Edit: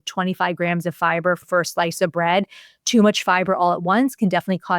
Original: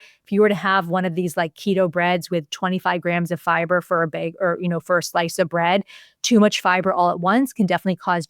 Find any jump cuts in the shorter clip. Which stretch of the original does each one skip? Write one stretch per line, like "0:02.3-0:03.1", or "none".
0:03.9-0:04.8

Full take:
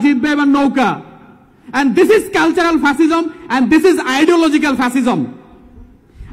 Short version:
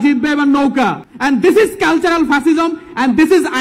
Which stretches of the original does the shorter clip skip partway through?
0:01.1-0:01.6

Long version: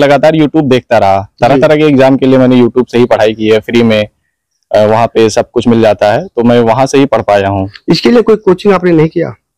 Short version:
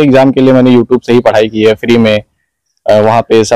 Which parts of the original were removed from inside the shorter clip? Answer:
none

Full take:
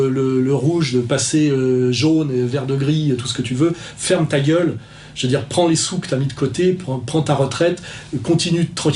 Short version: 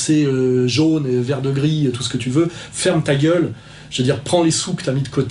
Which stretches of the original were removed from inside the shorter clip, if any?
none

